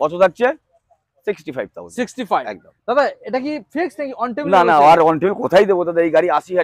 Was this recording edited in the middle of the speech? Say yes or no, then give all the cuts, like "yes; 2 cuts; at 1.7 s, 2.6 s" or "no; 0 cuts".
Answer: no; 0 cuts